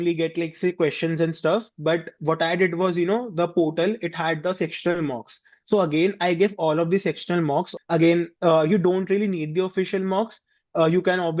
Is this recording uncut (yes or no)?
no